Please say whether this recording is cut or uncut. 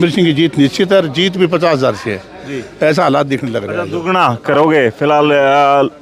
uncut